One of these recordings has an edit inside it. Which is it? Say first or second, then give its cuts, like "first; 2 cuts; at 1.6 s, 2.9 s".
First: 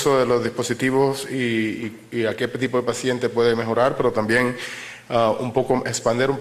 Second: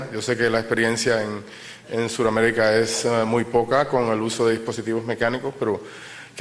first; 1 cut; at 1.0 s